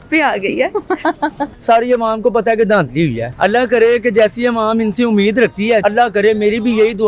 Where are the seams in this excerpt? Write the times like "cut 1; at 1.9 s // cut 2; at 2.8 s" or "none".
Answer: cut 1; at 1.5 s // cut 2; at 3.2 s // cut 3; at 5.8 s